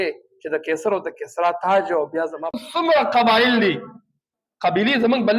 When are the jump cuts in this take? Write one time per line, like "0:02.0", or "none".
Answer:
0:02.6